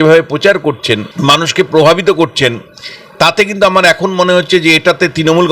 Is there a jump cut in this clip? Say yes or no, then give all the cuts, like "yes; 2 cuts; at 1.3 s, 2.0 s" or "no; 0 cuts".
yes; 1 cut; at 1.1 s